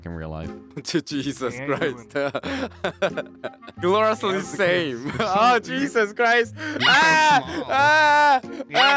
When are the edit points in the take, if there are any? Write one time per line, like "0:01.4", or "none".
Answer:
0:03.7

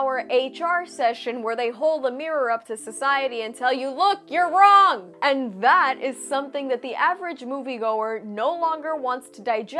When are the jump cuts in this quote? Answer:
none

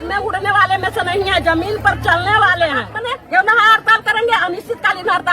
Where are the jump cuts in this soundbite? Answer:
0:02.9

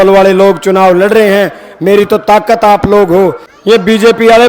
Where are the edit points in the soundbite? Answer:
0:03.5

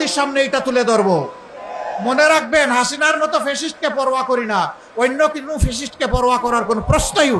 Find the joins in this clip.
none

